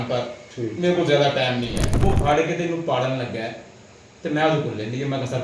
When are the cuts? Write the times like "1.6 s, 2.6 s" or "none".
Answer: 1.9 s